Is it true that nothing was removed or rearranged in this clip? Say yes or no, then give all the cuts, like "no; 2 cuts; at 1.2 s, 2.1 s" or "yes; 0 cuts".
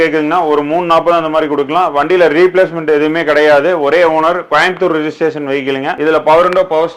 yes; 0 cuts